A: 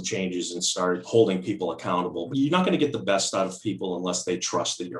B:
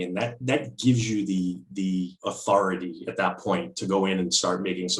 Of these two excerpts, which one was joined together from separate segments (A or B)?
A